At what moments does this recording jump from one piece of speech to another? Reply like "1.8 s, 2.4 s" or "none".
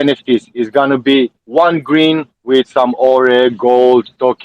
1.4 s